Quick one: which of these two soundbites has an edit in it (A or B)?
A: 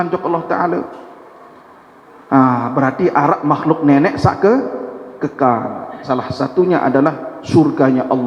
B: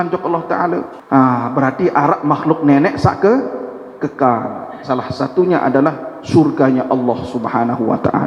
B